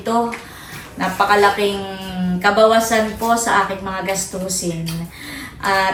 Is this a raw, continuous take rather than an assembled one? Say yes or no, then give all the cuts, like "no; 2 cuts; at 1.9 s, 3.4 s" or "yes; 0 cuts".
yes; 0 cuts